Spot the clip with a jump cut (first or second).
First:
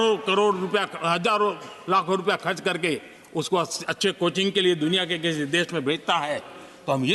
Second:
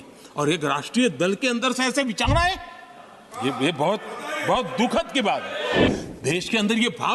second